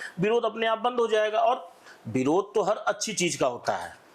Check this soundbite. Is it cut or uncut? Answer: uncut